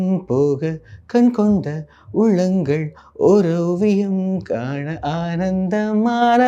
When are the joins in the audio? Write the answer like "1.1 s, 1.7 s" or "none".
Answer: none